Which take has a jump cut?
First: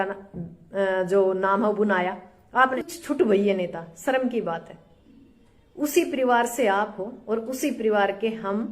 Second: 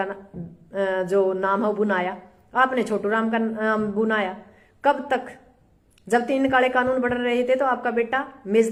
first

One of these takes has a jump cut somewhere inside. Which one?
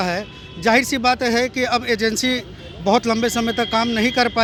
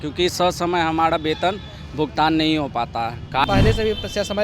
second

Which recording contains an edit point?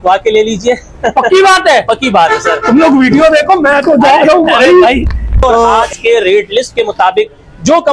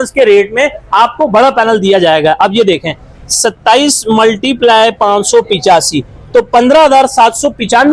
first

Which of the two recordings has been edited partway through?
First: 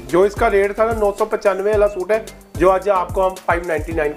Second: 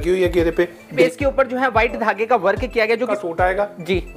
second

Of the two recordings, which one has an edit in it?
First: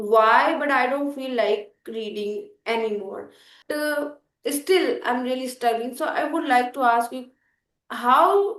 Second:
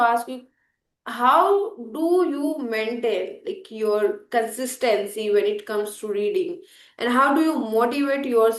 first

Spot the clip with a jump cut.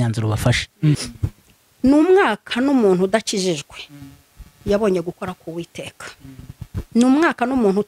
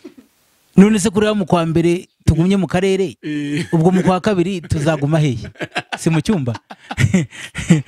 first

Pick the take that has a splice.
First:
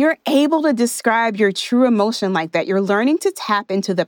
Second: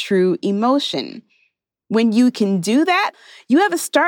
second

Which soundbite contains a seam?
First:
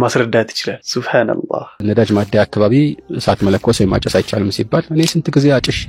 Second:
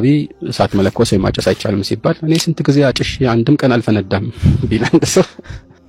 first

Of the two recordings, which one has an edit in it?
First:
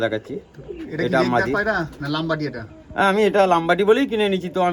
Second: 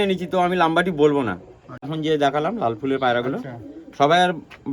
second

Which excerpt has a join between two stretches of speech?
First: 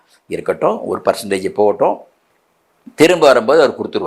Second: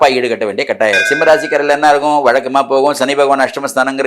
second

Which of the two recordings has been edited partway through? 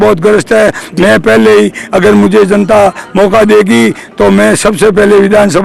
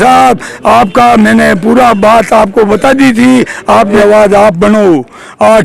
second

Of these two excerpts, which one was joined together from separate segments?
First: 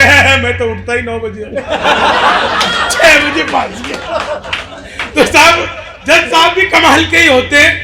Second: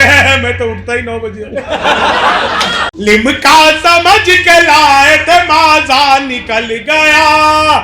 second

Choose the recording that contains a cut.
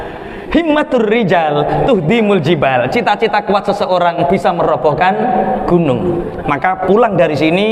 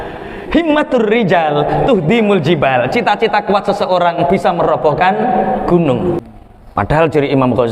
second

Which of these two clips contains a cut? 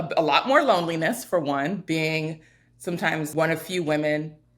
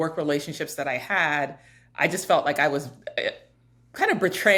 first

